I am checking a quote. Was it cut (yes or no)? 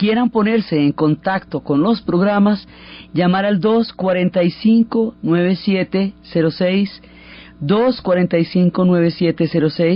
no